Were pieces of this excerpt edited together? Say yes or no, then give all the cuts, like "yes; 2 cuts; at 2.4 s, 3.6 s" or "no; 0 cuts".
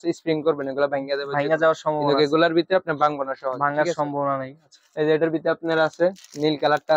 no; 0 cuts